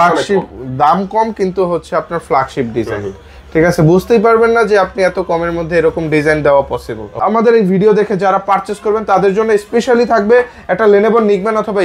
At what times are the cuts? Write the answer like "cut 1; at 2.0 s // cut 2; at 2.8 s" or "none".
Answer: cut 1; at 7.2 s